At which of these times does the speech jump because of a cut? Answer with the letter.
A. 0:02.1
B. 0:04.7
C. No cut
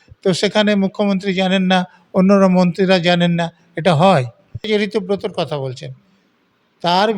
B